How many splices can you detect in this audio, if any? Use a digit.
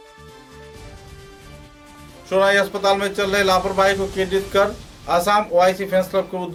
0